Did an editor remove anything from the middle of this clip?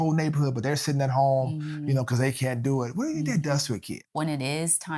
yes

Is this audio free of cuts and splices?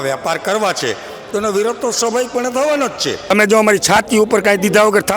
no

